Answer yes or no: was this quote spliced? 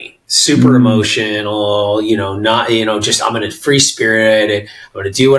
no